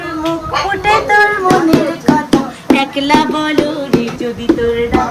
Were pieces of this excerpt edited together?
yes; 1 cut; at 4.2 s

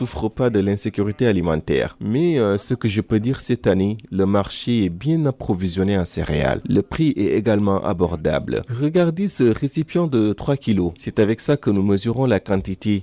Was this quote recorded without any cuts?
yes; 0 cuts

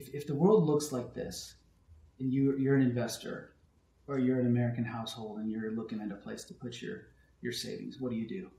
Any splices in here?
no; 0 cuts

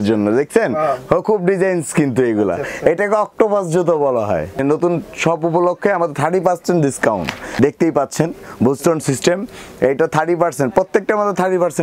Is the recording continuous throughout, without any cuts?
no; 2 cuts; at 4.5 s, 7.5 s

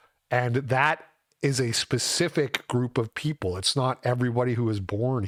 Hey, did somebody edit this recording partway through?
no; 0 cuts

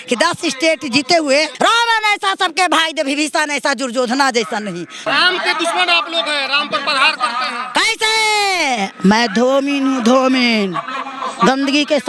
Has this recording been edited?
yes; 2 cuts; at 1.5 s, 5.0 s

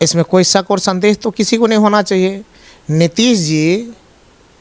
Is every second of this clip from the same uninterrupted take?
yes; 0 cuts

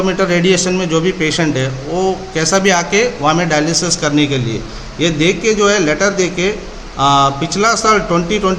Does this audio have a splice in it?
no; 0 cuts

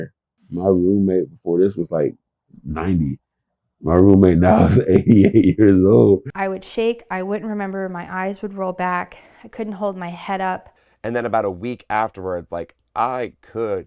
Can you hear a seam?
yes; 2 cuts; at 6.3 s, 10.7 s

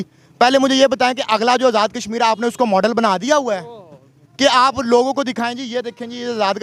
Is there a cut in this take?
no; 0 cuts

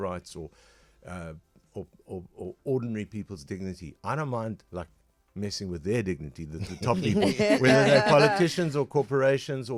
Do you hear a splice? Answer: no; 0 cuts

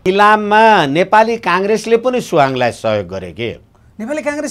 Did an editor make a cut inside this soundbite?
no; 0 cuts

